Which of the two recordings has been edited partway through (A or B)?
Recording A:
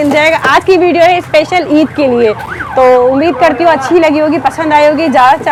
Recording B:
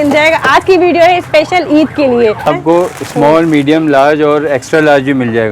B